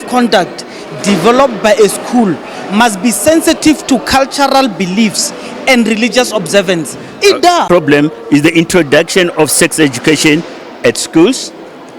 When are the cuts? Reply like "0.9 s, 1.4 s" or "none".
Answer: 7.6 s